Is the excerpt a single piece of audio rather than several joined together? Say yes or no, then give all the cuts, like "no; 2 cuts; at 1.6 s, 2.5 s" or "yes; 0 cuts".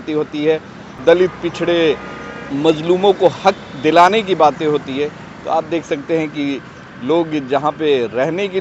no; 1 cut; at 1.0 s